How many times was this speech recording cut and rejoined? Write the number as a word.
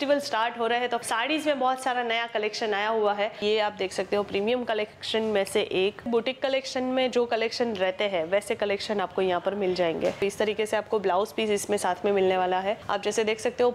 five